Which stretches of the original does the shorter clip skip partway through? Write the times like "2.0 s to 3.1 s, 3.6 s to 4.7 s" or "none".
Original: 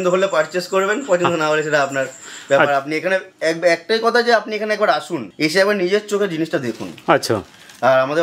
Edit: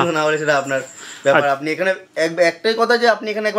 none

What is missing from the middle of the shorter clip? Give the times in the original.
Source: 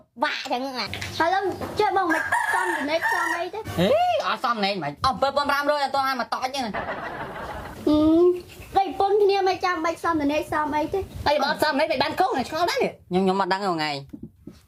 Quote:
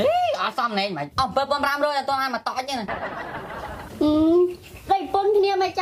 none

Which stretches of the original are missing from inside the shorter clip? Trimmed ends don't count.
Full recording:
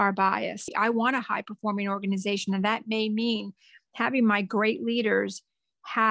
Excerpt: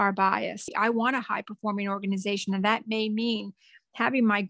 none

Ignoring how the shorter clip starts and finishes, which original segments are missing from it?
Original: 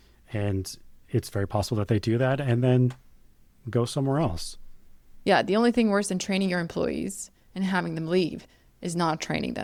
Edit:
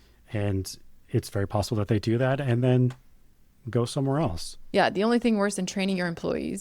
4.5 s to 5.0 s

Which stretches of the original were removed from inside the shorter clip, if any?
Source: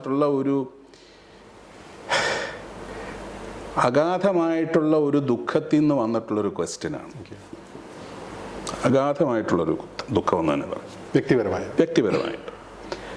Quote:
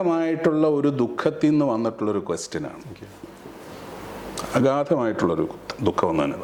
none

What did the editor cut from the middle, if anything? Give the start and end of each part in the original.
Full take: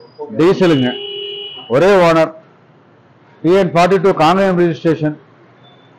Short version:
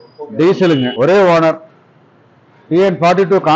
0.9 s to 1.6 s

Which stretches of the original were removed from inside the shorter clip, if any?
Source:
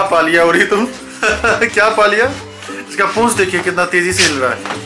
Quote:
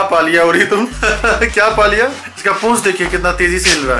1.0 s to 1.2 s, 2.5 s to 2.8 s

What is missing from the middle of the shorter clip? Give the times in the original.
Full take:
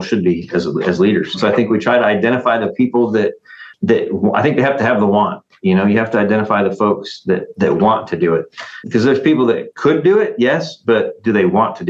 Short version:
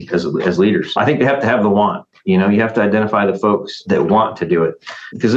1.4 s to 4.3 s, 7.1 s to 7.5 s

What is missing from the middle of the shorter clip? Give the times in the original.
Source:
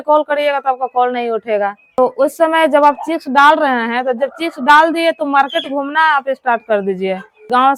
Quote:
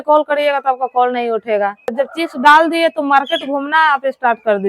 1.9 s to 4.1 s

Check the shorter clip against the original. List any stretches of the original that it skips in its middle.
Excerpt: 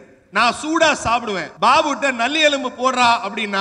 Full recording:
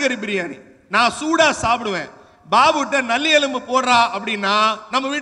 2.0 s to 2.3 s

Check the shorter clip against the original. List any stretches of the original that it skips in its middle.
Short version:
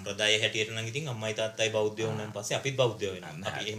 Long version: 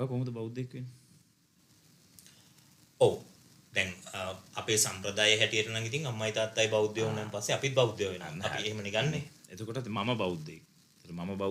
none

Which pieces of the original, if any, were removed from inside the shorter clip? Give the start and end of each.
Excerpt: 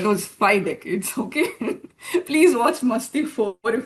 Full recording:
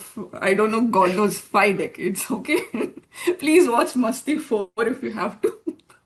none

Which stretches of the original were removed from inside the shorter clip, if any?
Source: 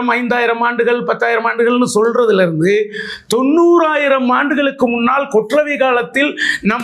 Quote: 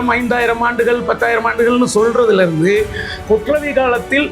3.2 s to 5.2 s

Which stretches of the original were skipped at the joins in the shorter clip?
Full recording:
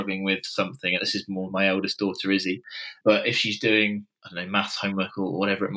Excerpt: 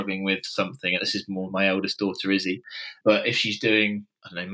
none

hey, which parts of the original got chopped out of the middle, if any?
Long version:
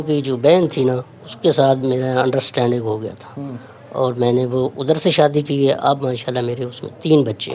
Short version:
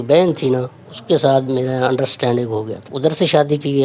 3.3 s to 4.8 s

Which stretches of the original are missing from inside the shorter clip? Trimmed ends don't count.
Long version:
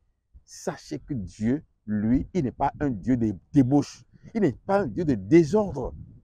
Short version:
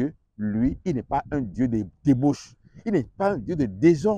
none

